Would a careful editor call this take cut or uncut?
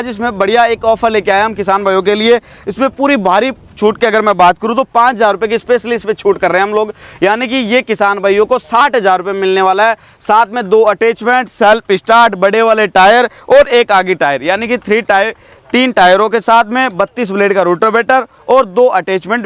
uncut